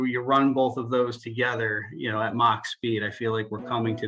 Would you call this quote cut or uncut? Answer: uncut